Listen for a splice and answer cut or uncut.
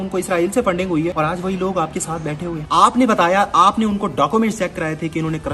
cut